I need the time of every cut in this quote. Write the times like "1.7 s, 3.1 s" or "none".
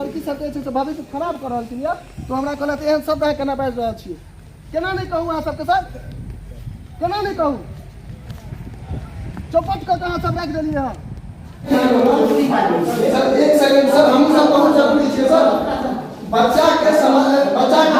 11.7 s

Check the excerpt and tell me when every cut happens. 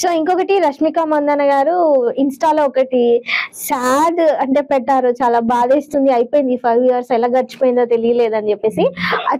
none

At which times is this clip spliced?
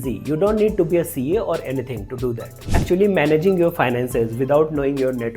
2.5 s

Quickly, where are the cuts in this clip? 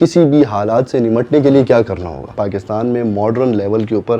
2.3 s

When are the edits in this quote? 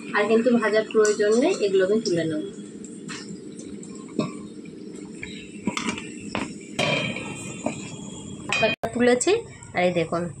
8.8 s

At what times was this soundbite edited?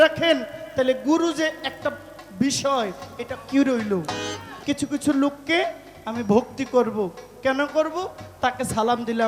4.5 s

